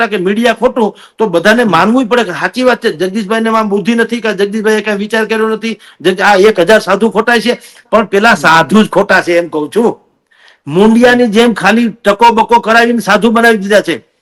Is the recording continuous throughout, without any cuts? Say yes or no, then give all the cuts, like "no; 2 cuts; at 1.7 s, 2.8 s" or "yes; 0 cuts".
yes; 0 cuts